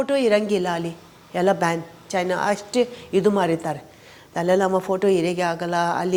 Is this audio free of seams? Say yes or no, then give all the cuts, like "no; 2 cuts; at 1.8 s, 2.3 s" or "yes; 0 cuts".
yes; 0 cuts